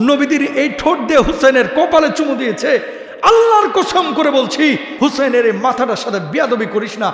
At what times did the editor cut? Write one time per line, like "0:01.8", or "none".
0:04.9